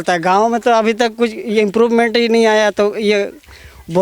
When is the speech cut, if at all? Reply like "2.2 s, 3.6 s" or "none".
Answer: none